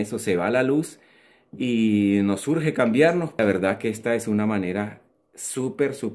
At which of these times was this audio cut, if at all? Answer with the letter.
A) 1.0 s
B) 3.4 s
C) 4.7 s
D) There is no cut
B